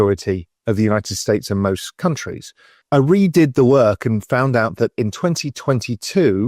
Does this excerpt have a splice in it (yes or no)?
yes